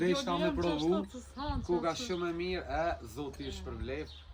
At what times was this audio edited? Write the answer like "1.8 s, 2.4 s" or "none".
none